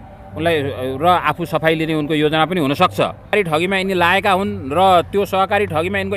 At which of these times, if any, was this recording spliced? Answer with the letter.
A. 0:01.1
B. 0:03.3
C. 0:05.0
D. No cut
B